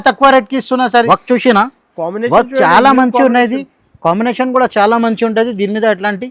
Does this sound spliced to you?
yes; 1 cut; at 1.0 s

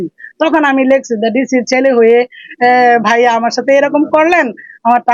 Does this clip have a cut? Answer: no; 0 cuts

